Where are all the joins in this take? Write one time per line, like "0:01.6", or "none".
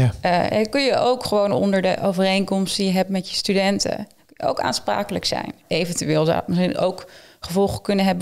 0:05.6

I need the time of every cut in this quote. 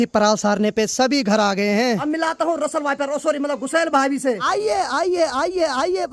0:02.0
0:04.5

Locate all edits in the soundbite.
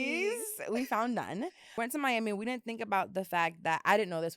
0:01.6

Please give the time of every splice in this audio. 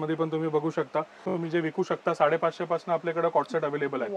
0:01.2

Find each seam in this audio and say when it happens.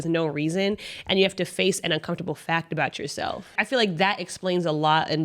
0:03.6

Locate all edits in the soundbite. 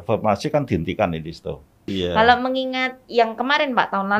0:01.8

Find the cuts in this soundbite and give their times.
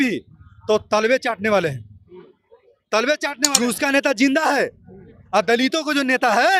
0:03.4

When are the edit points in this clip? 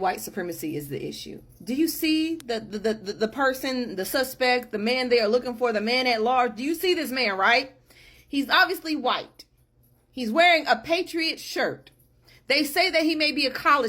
none

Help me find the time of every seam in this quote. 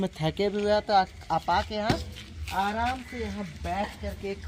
none

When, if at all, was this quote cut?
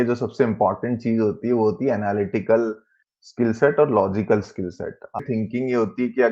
0:05.2

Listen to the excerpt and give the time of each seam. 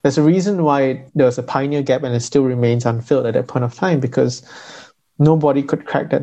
0:01.0

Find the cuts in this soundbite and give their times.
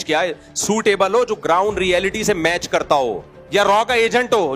0:02.8

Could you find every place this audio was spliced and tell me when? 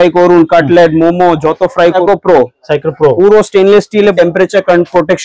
0:02.0
0:04.1

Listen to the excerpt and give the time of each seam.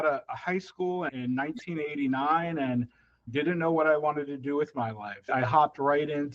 0:01.1
0:03.3
0:05.3

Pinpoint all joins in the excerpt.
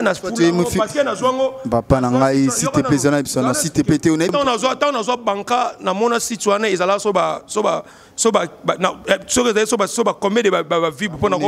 0:04.3

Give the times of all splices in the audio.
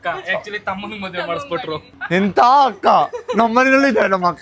none

